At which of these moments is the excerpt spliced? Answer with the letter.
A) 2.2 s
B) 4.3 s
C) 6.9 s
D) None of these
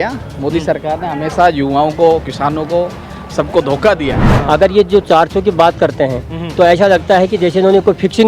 B